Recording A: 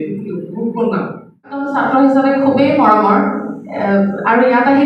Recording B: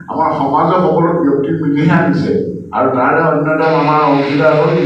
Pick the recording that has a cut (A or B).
A